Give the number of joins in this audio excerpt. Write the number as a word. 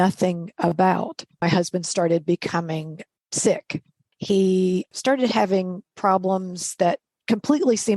three